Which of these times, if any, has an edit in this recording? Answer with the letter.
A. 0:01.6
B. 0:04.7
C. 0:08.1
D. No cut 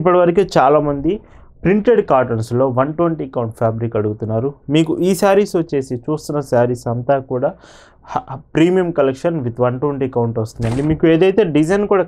D